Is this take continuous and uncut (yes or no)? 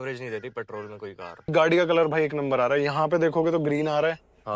no